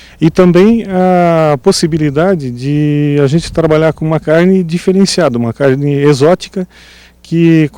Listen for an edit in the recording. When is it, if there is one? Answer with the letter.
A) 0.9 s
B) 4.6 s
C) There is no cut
A